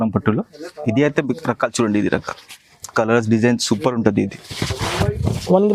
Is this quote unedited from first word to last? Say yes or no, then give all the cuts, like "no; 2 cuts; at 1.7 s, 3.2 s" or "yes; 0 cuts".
yes; 0 cuts